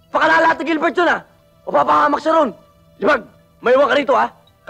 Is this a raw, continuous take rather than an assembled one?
yes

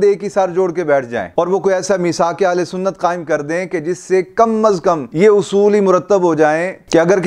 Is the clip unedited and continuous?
yes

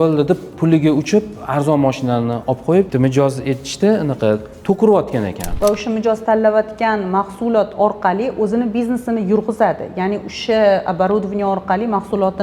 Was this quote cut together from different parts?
yes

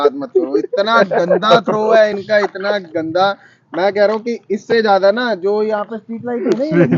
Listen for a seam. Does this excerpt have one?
no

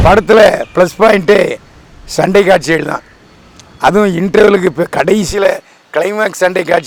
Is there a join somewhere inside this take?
no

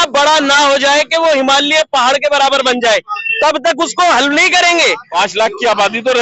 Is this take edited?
yes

